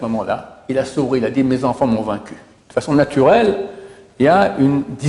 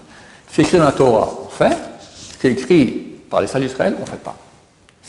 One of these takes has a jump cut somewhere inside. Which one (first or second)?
first